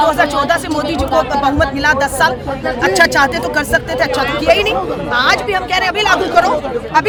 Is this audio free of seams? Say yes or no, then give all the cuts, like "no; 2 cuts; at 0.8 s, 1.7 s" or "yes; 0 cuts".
yes; 0 cuts